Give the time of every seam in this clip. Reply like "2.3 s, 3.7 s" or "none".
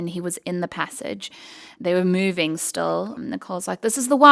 1.8 s, 3.2 s